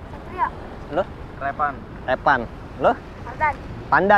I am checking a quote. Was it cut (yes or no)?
no